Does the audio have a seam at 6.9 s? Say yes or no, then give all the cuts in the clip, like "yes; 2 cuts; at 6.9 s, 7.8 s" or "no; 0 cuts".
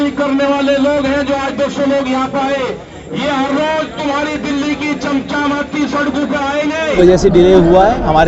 yes; 1 cut; at 6.9 s